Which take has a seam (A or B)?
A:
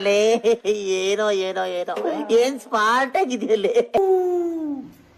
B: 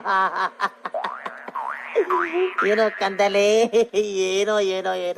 A